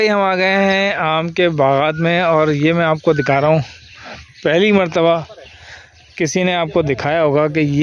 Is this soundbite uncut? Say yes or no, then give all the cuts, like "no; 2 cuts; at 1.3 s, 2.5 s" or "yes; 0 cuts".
yes; 0 cuts